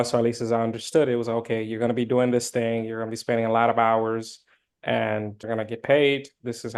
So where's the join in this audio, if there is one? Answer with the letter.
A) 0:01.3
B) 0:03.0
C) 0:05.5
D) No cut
C